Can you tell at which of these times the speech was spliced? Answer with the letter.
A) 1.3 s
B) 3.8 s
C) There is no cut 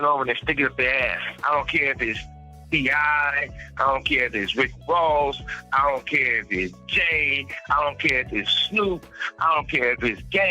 A